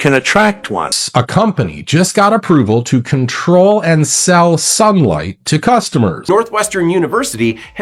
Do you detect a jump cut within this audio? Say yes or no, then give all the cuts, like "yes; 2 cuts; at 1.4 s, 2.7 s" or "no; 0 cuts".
yes; 2 cuts; at 0.9 s, 6.2 s